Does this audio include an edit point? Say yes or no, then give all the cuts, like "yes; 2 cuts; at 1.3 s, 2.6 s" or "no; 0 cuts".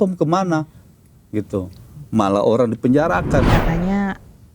yes; 1 cut; at 3.5 s